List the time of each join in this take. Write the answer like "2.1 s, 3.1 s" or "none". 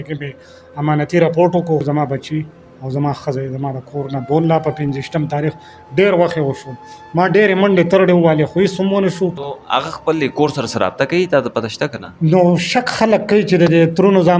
1.8 s, 9.5 s